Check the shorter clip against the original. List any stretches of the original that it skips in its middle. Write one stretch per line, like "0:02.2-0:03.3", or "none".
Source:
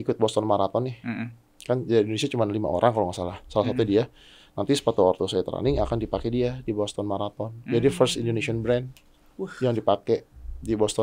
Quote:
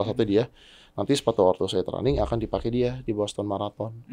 none